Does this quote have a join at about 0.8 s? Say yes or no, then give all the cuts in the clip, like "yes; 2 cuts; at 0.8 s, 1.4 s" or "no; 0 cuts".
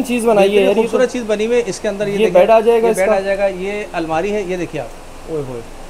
no; 0 cuts